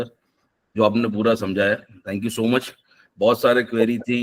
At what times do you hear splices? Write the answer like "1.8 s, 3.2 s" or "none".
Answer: none